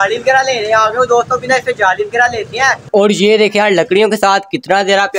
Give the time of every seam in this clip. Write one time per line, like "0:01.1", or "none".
0:02.8